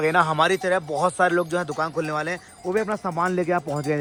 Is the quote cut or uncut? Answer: uncut